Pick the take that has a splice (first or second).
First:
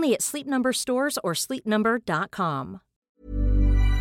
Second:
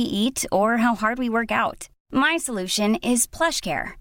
first